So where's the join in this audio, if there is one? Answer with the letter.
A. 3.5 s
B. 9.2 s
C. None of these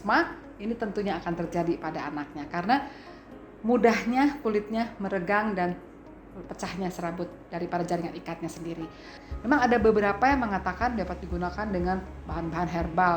B